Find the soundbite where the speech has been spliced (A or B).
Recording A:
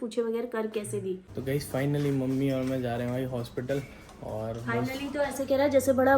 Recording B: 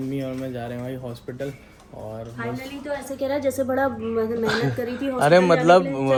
A